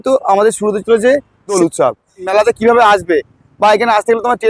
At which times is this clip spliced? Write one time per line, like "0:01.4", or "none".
0:01.6